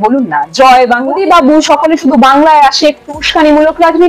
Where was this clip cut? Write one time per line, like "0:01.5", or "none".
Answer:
0:01.2